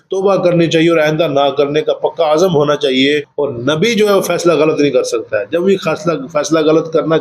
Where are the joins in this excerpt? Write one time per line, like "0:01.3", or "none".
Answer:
0:03.3